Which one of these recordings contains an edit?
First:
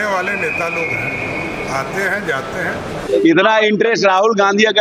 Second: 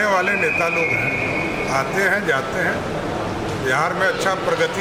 first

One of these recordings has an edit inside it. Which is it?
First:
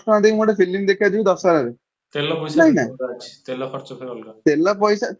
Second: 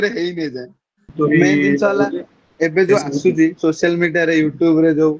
second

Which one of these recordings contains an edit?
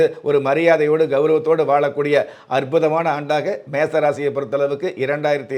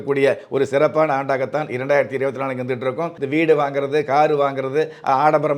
second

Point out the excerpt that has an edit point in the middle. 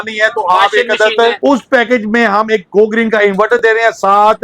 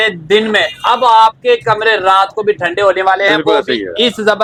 first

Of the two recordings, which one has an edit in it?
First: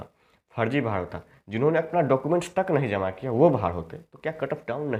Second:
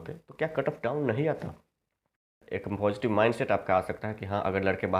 second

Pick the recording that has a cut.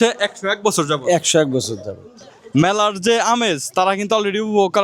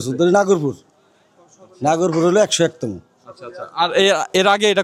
first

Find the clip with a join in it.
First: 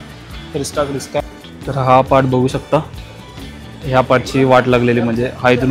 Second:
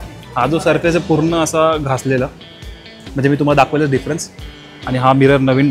first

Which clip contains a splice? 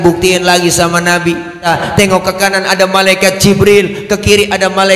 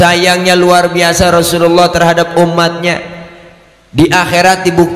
first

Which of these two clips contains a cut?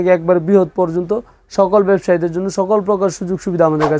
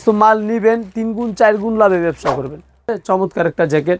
second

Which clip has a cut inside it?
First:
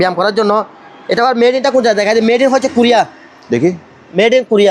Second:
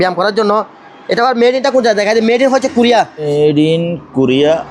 second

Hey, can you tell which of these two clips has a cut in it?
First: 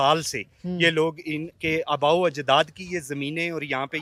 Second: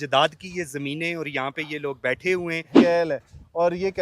second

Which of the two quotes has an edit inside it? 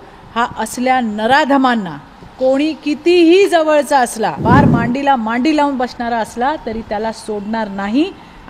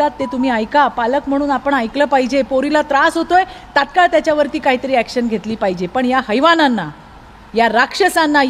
first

